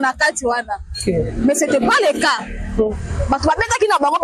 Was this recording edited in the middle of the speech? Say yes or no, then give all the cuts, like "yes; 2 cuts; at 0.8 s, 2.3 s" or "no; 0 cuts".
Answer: no; 0 cuts